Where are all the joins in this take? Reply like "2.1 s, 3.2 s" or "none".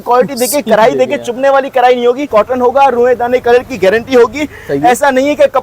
2.2 s